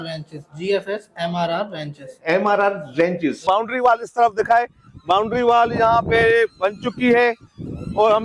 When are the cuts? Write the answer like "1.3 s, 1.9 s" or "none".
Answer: 3.4 s